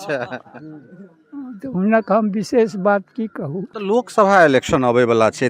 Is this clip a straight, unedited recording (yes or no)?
no